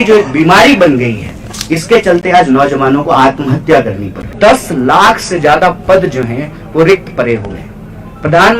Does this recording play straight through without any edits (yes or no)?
no